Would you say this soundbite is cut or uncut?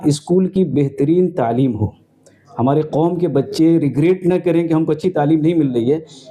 uncut